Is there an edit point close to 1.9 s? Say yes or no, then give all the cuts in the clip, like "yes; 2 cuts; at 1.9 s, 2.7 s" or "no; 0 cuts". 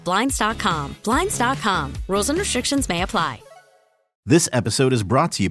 no; 1 cut; at 4.1 s